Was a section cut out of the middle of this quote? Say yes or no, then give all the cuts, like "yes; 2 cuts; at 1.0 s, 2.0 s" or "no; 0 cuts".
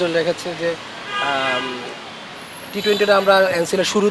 no; 0 cuts